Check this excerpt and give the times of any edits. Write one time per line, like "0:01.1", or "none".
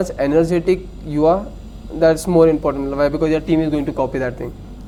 none